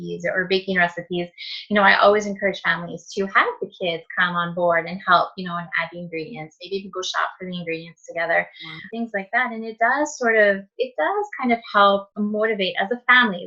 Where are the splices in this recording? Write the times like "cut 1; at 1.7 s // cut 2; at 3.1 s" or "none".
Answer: cut 1; at 8.9 s // cut 2; at 12.1 s